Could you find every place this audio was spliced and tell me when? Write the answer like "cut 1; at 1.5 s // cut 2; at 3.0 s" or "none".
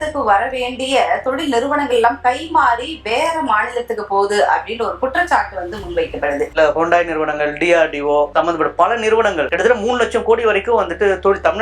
cut 1; at 6.5 s